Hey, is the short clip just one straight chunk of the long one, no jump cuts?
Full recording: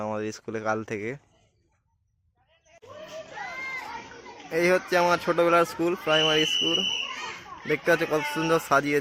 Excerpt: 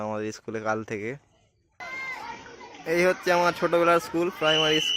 no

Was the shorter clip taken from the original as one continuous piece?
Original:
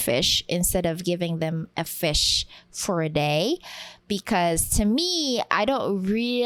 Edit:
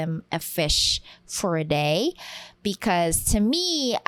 yes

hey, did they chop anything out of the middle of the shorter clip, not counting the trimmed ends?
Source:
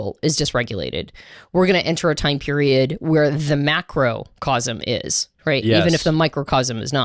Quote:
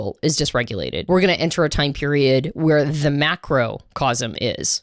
yes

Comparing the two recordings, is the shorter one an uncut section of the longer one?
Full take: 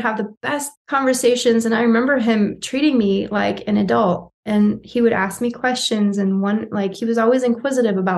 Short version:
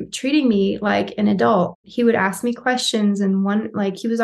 no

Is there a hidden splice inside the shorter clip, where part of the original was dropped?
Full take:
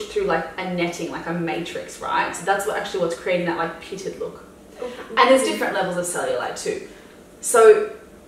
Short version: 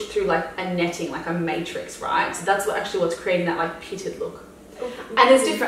no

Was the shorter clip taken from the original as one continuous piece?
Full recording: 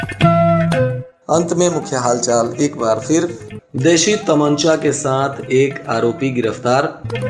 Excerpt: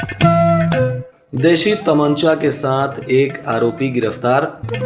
no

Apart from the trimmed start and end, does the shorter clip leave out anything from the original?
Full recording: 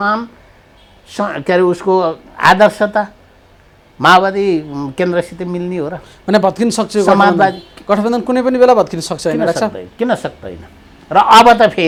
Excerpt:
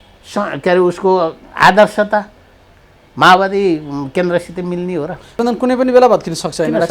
yes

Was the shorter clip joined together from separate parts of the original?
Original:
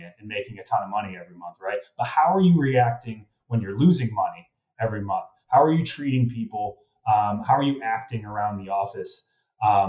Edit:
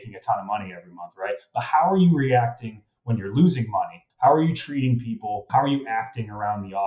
yes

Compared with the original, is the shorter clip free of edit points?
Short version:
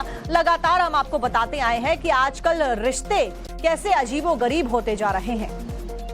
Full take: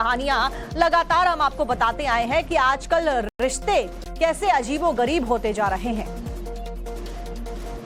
no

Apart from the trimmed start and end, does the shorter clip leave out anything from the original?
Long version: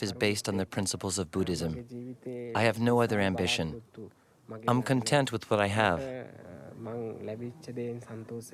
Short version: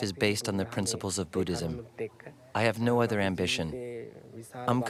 no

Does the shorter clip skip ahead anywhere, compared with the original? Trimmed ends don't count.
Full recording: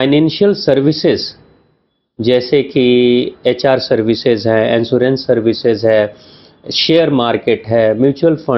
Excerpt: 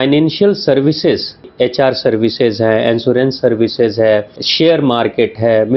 yes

